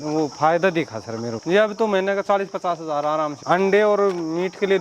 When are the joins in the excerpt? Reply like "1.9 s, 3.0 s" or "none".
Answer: 1.4 s, 3.4 s